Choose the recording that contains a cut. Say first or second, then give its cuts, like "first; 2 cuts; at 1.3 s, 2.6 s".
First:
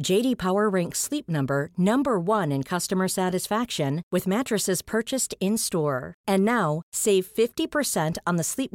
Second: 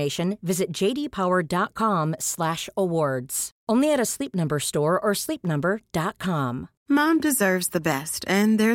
second; 1 cut; at 6.7 s